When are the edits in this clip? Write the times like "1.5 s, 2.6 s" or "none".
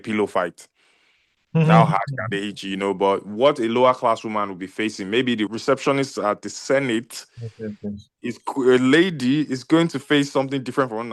5.5 s

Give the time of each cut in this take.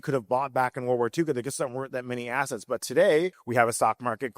3.4 s

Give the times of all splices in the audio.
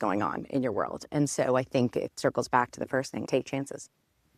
none

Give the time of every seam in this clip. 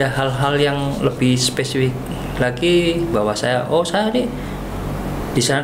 none

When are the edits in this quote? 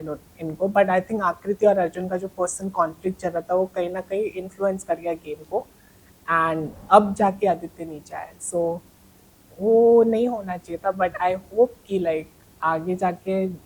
none

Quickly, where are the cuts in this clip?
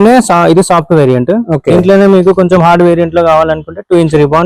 none

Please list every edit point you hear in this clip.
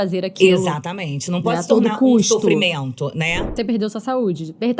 3.5 s

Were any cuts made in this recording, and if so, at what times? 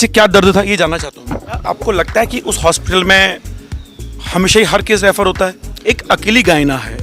1.7 s, 5.7 s

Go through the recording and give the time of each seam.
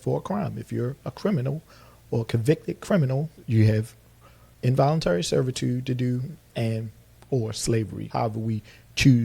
3.4 s

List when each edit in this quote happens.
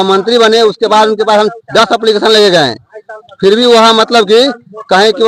none

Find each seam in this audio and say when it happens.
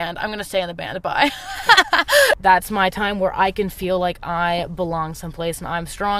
2.4 s

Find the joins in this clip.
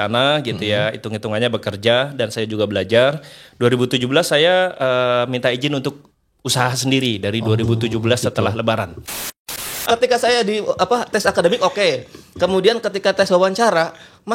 9.6 s

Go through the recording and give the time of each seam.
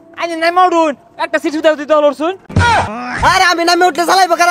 2.7 s

